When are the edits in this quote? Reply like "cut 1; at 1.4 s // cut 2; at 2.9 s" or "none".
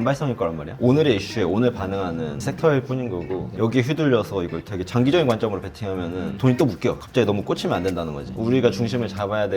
cut 1; at 3.5 s // cut 2; at 7.0 s // cut 3; at 8.3 s

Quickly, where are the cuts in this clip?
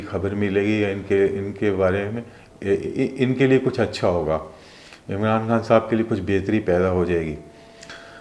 none

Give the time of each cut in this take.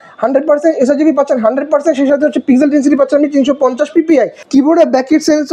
cut 1; at 4.4 s

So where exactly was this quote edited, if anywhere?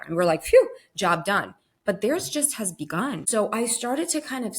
cut 1; at 3.2 s

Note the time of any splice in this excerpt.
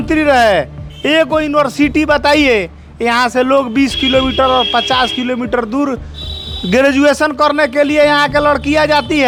none

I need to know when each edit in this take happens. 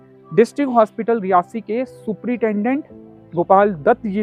none

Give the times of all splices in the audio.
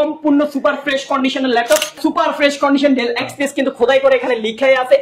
cut 1; at 2.0 s

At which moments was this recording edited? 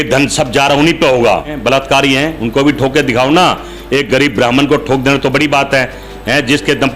cut 1; at 1.6 s

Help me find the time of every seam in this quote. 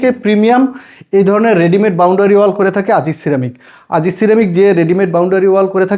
none

